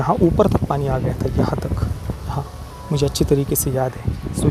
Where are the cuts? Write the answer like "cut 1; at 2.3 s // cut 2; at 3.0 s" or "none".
none